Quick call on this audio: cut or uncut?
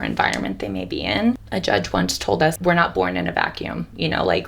cut